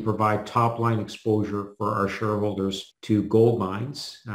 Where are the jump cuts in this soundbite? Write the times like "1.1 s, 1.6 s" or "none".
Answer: 2.9 s